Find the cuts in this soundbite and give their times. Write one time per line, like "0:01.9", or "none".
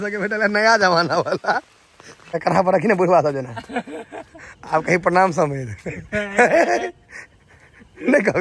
0:02.4